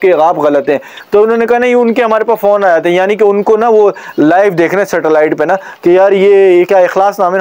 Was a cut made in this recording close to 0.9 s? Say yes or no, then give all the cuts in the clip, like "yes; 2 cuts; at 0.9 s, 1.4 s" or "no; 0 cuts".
yes; 1 cut; at 0.9 s